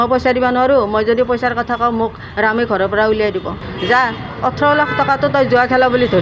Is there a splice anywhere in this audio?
yes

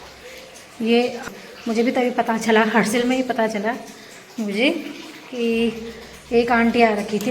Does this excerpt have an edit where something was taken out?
yes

